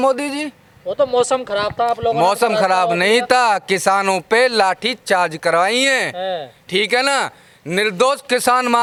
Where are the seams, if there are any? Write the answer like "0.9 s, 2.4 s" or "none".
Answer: none